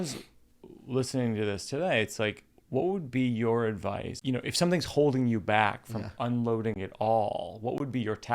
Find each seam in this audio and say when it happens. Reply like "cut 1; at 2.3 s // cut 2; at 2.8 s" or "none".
cut 1; at 4.1 s